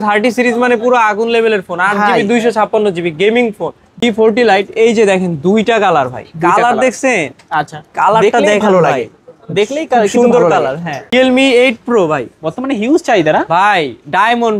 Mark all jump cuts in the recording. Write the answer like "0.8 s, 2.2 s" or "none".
4.0 s, 11.1 s